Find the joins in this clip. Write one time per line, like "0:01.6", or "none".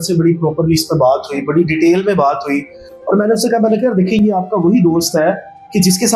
none